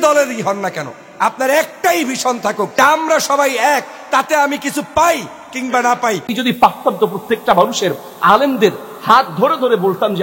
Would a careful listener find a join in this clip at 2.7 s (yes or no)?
yes